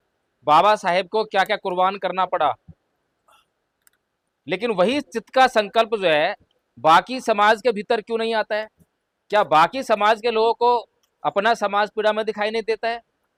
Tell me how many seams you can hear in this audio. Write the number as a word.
zero